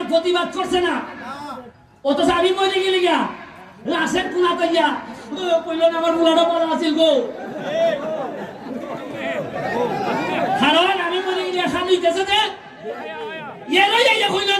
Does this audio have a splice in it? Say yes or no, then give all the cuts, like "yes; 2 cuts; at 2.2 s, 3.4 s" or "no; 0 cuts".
no; 0 cuts